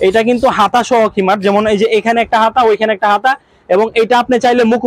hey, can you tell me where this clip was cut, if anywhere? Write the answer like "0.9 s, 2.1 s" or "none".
none